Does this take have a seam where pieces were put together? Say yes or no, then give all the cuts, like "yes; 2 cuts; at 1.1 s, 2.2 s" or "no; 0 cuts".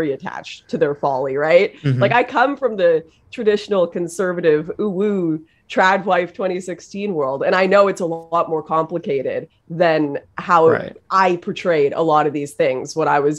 no; 0 cuts